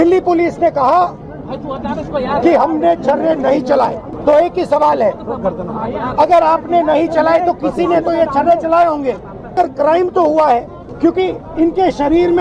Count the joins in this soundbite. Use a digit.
3